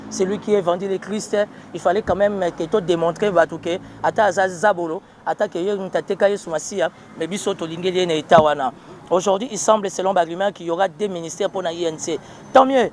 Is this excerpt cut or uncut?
uncut